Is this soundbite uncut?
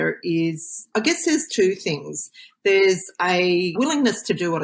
no; 2 cuts; at 0.9 s, 3.8 s

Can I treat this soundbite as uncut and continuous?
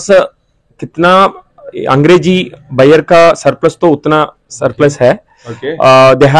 yes; 0 cuts

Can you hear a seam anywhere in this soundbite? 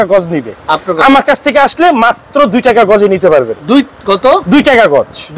no; 0 cuts

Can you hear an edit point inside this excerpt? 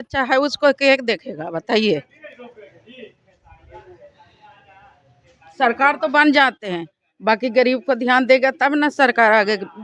no; 0 cuts

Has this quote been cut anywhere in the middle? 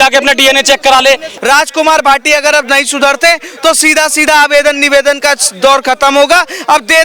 yes; 1 cut; at 1.3 s

